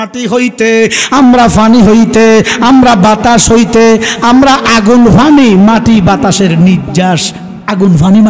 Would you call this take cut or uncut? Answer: uncut